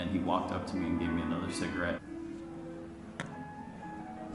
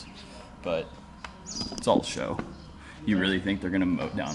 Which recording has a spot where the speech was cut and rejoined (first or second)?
first